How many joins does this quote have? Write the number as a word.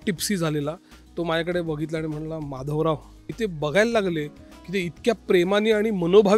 one